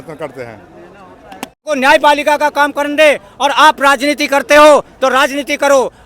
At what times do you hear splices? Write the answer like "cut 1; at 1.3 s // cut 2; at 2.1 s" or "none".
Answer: cut 1; at 1.7 s